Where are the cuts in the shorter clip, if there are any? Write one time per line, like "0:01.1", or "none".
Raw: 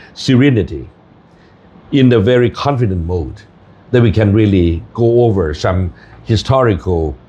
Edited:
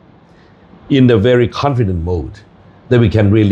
none